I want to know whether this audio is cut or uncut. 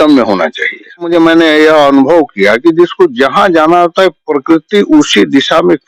cut